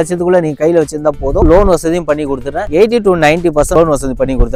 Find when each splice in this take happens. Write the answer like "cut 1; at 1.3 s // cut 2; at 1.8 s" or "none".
none